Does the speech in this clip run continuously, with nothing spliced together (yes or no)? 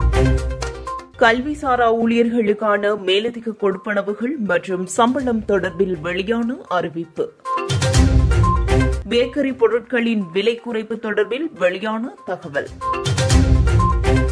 no